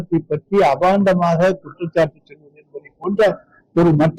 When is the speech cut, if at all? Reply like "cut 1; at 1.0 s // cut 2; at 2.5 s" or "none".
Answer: none